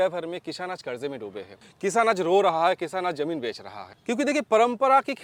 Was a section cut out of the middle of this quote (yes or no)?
no